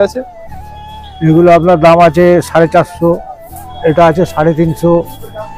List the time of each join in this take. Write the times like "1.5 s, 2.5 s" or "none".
none